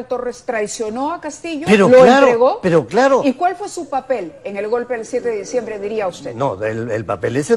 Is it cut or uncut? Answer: uncut